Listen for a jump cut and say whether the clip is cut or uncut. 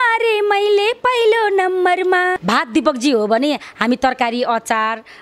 cut